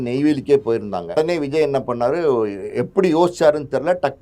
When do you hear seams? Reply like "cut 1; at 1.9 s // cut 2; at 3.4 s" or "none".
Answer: cut 1; at 1.2 s